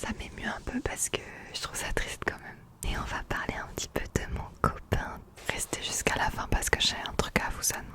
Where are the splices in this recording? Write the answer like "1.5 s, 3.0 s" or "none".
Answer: 2.8 s, 5.2 s

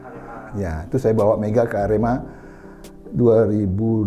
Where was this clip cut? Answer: none

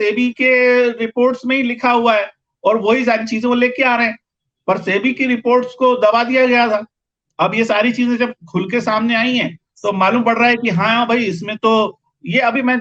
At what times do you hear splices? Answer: none

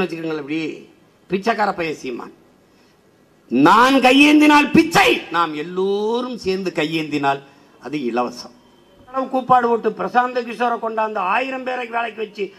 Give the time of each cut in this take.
9.2 s

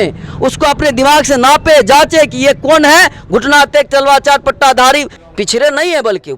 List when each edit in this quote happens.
5.2 s

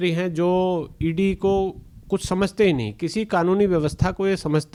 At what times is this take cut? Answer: none

